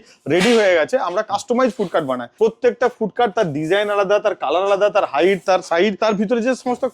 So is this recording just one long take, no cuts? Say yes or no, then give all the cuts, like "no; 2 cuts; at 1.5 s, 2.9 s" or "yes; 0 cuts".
no; 2 cuts; at 2.3 s, 6.0 s